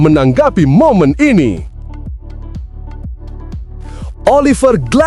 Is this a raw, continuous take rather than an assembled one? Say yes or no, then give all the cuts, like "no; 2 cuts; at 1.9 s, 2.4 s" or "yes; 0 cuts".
no; 2 cuts; at 2.2 s, 4.2 s